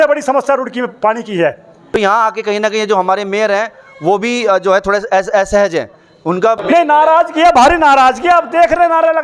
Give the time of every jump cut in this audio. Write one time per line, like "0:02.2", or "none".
0:01.9
0:06.6